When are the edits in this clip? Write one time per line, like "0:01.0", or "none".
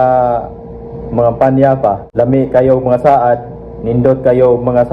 0:02.0